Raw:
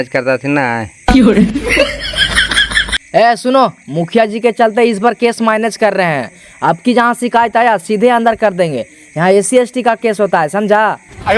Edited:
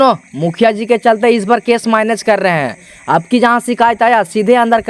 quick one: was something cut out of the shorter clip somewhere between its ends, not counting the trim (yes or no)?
no